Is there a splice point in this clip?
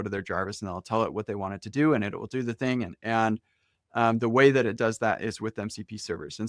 no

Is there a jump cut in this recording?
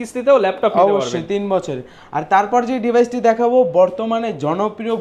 no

